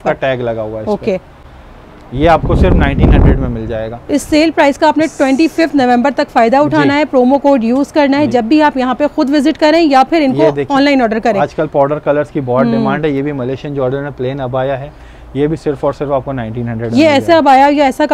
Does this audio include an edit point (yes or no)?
no